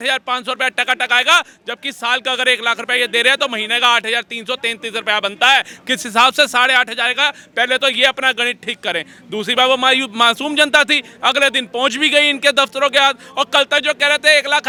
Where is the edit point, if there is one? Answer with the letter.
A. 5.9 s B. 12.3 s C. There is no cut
C